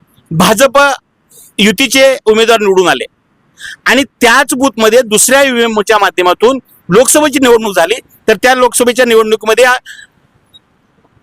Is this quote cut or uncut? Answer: uncut